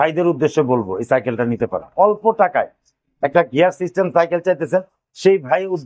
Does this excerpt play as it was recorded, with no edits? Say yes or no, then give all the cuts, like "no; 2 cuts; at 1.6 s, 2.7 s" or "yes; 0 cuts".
no; 1 cut; at 1.9 s